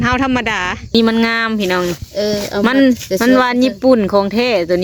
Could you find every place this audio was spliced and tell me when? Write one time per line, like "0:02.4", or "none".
0:00.9